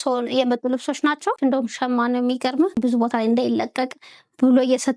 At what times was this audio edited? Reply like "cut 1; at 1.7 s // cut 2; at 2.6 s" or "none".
cut 1; at 1.4 s // cut 2; at 2.8 s